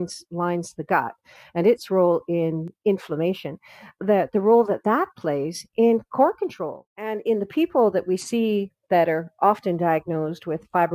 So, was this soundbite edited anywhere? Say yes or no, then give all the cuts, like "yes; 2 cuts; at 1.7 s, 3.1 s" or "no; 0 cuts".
yes; 1 cut; at 6.9 s